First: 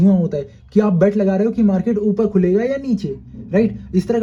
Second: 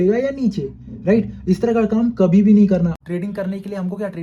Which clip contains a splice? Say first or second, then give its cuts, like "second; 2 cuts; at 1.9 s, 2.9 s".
second; 1 cut; at 2.9 s